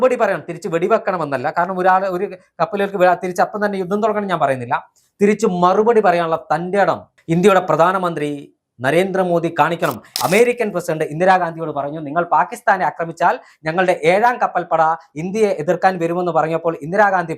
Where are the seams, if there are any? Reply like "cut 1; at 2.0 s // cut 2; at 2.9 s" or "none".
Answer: cut 1; at 7.1 s // cut 2; at 10.1 s